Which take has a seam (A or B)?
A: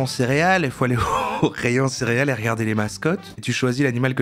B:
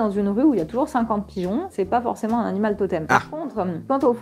B